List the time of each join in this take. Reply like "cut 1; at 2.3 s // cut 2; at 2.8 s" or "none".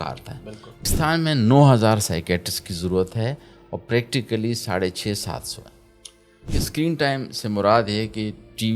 cut 1; at 0.8 s // cut 2; at 6.6 s